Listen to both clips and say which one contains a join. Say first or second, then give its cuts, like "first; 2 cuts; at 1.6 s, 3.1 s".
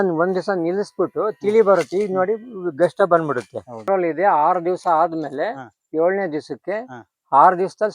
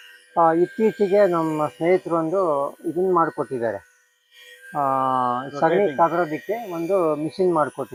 first; 1 cut; at 3.8 s